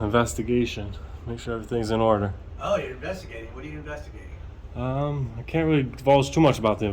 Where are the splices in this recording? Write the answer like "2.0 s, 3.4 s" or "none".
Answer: none